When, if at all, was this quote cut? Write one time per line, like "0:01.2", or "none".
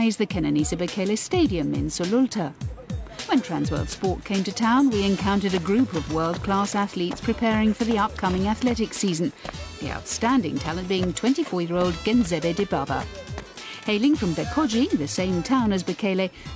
0:00.9

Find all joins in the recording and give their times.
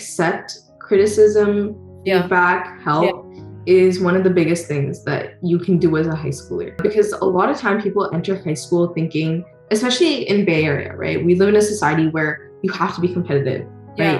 none

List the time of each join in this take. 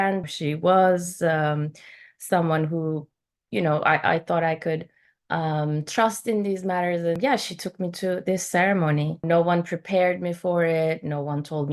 0:07.2
0:09.2

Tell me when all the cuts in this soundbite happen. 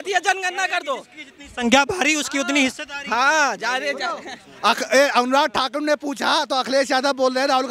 none

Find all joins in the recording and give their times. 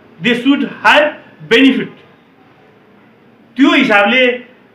none

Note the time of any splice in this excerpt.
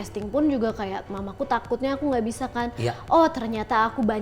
none

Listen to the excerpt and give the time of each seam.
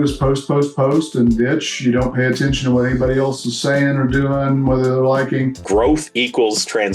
0:05.6

